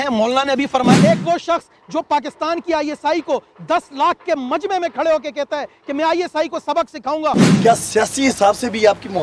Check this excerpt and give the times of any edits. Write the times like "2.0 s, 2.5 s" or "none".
1.0 s, 7.4 s